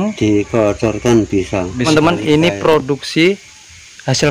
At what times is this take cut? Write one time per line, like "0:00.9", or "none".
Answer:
0:01.9